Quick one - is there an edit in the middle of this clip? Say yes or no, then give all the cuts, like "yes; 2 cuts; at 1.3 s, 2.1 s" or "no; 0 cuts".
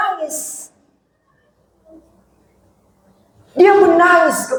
no; 0 cuts